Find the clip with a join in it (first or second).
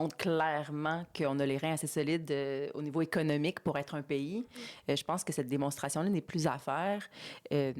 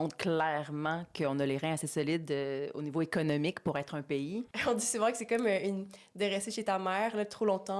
second